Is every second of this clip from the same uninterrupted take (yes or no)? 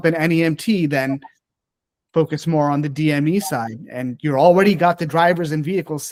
yes